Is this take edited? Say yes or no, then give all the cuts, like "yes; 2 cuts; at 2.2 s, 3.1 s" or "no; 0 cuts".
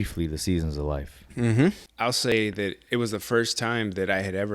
yes; 1 cut; at 2.3 s